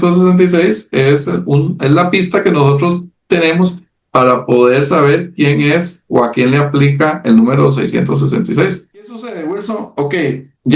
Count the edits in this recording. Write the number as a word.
one